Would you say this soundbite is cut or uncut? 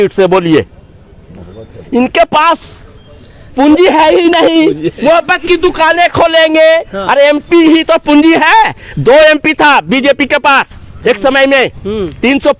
uncut